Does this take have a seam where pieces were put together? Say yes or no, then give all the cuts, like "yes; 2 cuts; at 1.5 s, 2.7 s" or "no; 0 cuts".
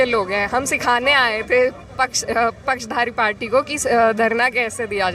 no; 0 cuts